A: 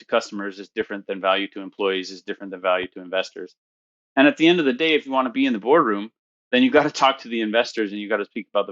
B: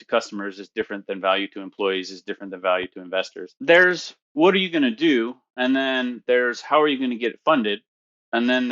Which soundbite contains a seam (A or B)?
B